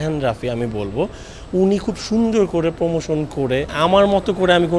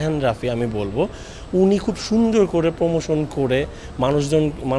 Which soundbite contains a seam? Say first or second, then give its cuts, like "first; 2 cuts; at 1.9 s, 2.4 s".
first; 1 cut; at 3.7 s